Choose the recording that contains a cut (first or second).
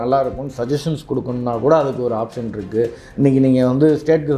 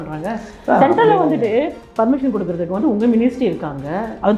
second